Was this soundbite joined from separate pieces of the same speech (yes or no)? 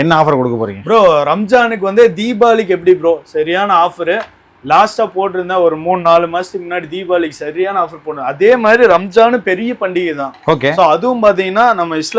no